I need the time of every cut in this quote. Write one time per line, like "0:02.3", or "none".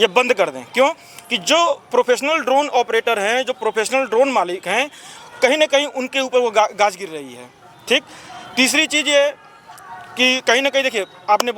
none